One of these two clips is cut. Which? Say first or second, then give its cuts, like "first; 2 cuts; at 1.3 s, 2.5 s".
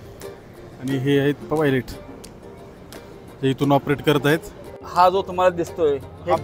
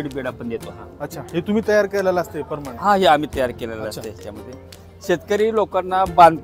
first; 1 cut; at 4.9 s